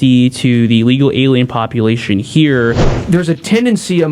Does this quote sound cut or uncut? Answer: cut